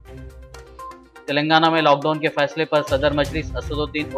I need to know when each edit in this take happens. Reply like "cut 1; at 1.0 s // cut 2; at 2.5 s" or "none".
none